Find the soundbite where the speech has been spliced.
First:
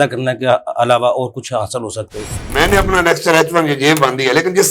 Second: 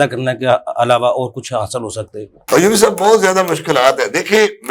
first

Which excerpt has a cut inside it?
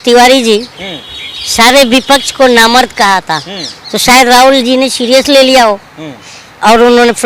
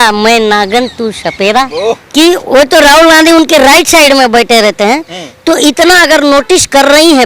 second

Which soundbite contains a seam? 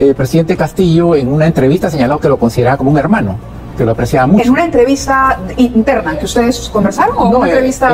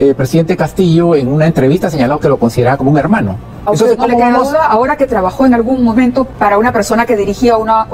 second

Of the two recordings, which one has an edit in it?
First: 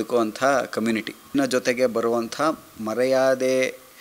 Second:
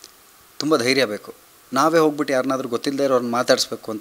first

